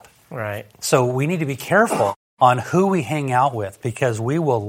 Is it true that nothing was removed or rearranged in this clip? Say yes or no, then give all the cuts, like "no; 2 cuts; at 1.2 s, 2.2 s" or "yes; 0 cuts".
no; 1 cut; at 2.2 s